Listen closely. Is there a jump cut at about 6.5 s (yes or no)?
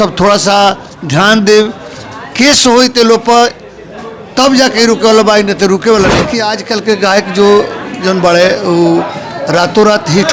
yes